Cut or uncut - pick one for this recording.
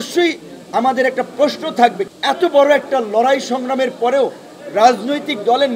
cut